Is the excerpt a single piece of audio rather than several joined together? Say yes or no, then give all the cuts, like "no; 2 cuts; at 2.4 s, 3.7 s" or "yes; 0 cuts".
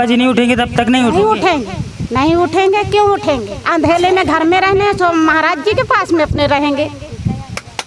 yes; 0 cuts